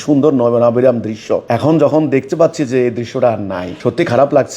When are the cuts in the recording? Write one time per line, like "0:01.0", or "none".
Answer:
0:01.4
0:03.7

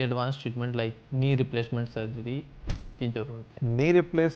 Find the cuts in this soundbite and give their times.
0:01.0
0:03.5

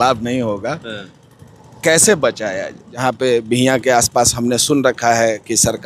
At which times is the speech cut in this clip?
0:02.8

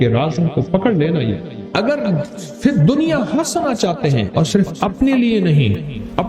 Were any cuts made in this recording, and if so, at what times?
0:01.5

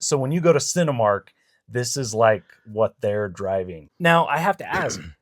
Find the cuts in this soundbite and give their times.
0:03.8

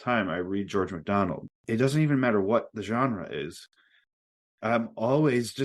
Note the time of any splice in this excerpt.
0:01.5

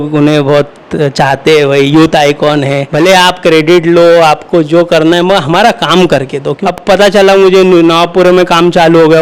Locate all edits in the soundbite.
0:02.8
0:06.5

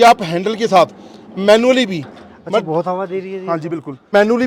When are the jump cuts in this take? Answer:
none

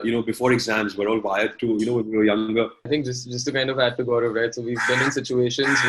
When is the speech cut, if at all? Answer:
0:02.9

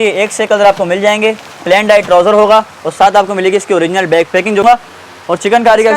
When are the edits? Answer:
0:04.6

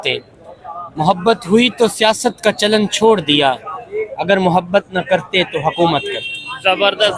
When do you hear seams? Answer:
none

